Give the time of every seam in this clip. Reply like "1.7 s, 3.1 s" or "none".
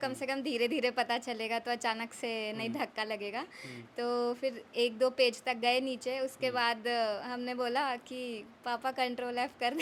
none